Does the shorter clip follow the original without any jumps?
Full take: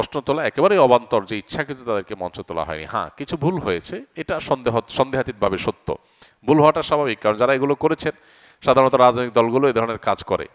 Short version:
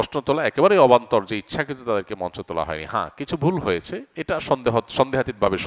yes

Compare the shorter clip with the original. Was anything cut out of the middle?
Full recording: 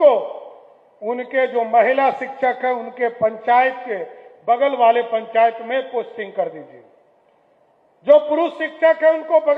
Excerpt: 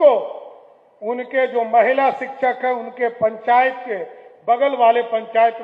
no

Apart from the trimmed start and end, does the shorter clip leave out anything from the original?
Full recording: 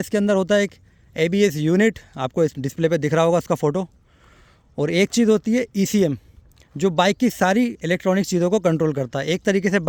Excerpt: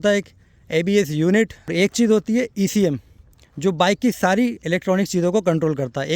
yes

